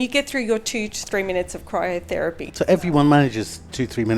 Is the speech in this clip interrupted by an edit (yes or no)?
no